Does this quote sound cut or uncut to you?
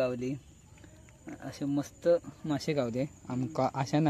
uncut